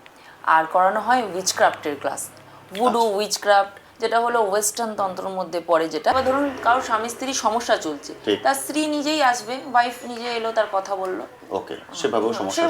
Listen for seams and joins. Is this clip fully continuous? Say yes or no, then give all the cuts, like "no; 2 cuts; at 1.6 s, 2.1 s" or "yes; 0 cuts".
no; 1 cut; at 6.1 s